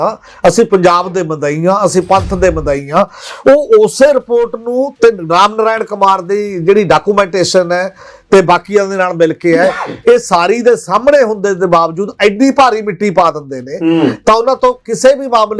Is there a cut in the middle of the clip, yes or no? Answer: no